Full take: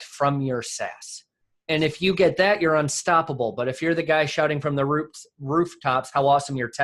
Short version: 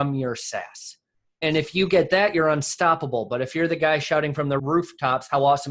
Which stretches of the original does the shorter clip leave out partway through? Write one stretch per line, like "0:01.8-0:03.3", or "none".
0:04.9-0:05.4